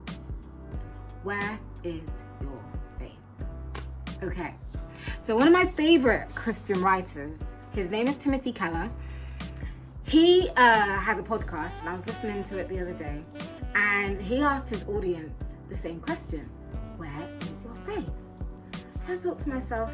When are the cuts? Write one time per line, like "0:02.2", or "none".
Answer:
0:01.2

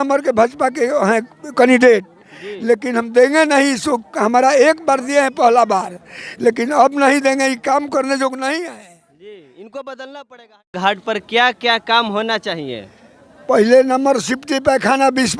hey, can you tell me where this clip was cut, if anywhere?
0:10.7

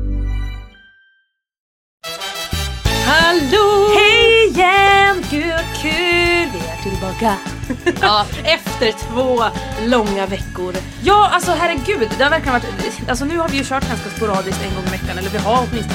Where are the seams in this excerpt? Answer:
0:02.0

